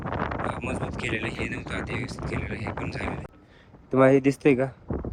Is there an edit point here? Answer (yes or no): yes